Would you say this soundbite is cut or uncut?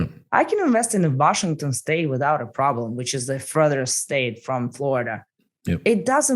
uncut